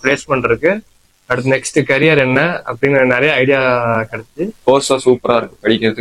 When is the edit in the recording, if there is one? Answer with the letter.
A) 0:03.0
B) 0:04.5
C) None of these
B